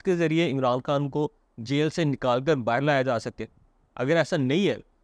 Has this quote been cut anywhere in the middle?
no; 0 cuts

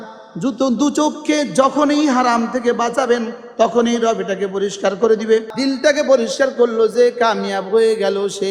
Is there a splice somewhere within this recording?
yes; 1 cut; at 5.5 s

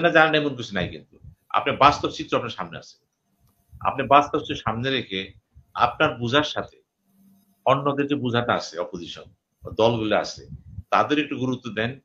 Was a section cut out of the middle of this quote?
no; 0 cuts

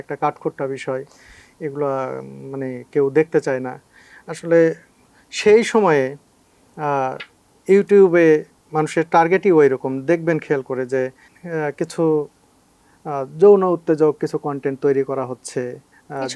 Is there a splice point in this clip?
no; 0 cuts

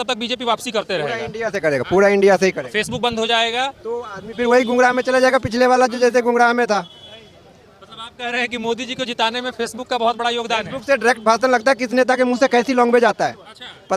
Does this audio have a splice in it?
no; 0 cuts

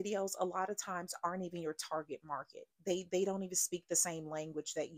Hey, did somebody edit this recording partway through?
no; 0 cuts

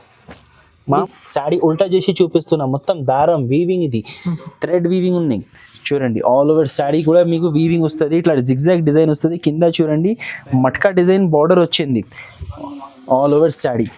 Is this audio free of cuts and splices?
no; 1 cut; at 1.0 s

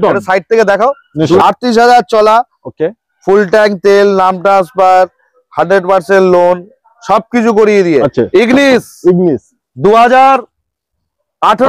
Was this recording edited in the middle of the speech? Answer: yes; 2 cuts; at 1.4 s, 8.1 s

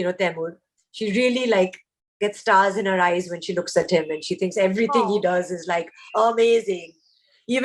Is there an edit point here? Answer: no; 0 cuts

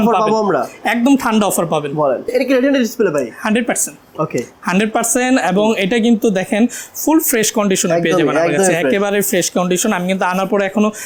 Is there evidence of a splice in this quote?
no; 0 cuts

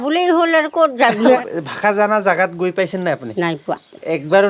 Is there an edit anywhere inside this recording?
yes; 1 cut; at 1.2 s

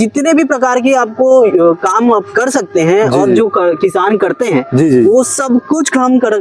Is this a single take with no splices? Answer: yes; 0 cuts

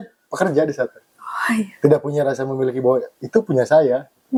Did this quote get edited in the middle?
no; 0 cuts

